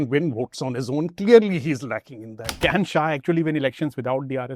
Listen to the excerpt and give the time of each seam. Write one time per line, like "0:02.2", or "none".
0:02.4